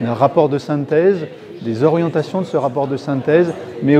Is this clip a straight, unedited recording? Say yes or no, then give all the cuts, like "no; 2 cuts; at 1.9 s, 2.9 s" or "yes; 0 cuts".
yes; 0 cuts